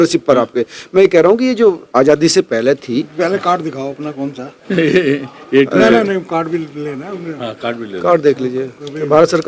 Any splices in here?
no; 0 cuts

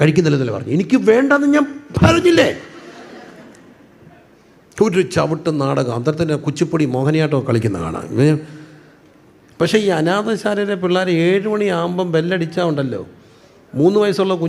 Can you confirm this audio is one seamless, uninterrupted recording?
yes; 0 cuts

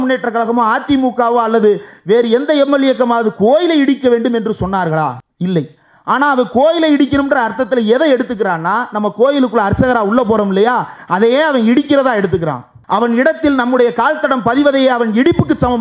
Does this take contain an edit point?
yes; 2 cuts; at 5.3 s, 12.7 s

